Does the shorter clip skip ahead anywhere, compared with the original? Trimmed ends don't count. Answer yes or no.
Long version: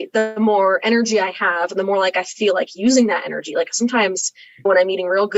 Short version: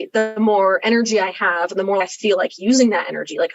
yes